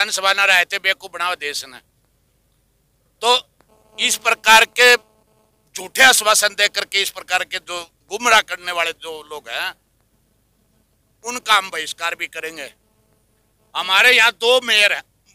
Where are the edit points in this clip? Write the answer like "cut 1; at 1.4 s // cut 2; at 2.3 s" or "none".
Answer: none